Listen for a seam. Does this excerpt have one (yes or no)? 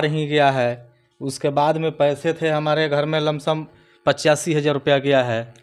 no